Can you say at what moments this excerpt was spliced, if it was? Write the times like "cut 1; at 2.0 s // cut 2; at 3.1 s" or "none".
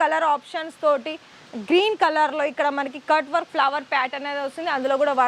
none